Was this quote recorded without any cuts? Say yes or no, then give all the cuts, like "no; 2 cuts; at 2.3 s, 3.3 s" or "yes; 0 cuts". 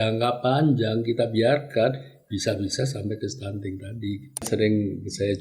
no; 1 cut; at 4.4 s